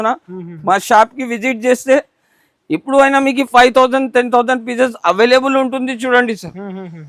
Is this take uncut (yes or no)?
yes